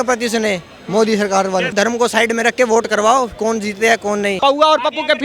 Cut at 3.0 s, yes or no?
no